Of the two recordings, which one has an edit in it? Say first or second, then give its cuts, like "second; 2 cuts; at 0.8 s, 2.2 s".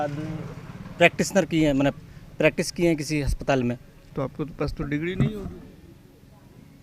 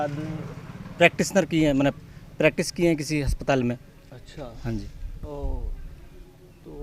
first; 1 cut; at 4.1 s